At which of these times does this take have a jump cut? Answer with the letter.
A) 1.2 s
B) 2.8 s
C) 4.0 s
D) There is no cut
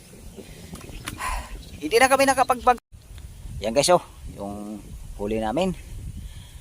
B